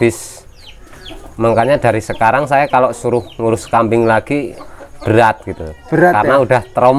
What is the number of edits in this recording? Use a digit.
0